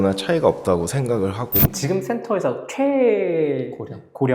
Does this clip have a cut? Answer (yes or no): yes